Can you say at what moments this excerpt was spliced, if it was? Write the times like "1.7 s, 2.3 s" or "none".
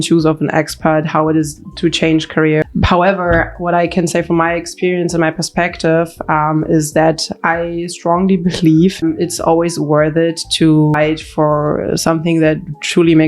2.6 s, 9.0 s, 11.0 s